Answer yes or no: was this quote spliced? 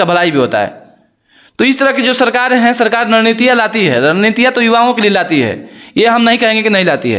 no